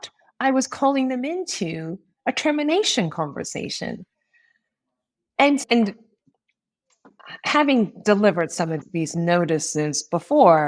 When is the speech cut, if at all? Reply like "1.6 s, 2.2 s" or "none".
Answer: 5.6 s, 8.8 s